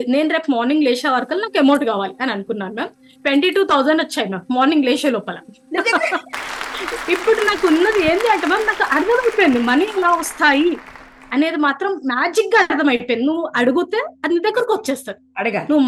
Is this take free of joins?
yes; 0 cuts

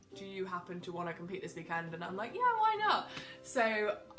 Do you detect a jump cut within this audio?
no; 0 cuts

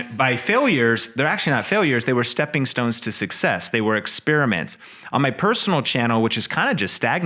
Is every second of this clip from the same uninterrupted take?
yes; 0 cuts

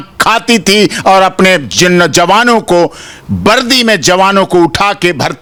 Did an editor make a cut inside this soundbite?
no; 0 cuts

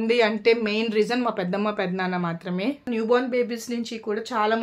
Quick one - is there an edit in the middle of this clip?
yes; 1 cut; at 2.9 s

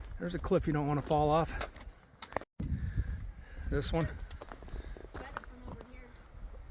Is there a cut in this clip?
no; 0 cuts

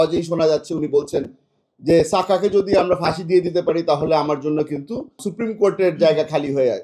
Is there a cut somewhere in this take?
yes; 1 cut; at 5.3 s

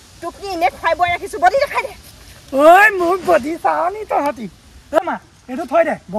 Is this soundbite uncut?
no; 1 cut; at 5.0 s

